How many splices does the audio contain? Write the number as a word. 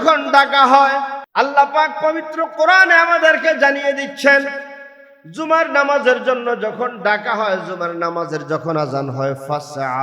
one